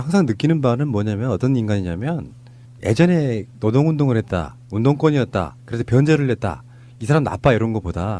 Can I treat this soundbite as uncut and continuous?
no; 1 cut; at 6.2 s

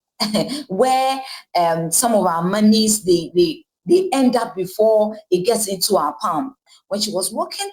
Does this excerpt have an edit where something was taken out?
yes; 1 cut; at 6.6 s

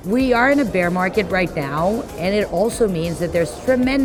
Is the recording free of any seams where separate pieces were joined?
yes; 0 cuts

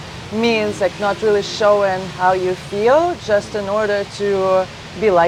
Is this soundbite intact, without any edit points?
yes; 0 cuts

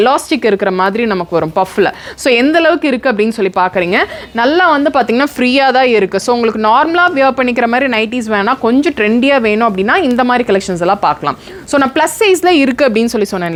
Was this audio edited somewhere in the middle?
no; 0 cuts

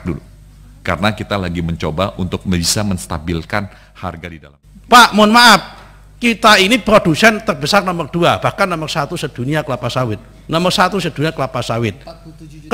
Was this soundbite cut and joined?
yes; 1 cut; at 4.3 s

